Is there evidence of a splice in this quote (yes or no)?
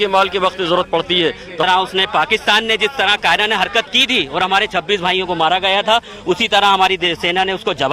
yes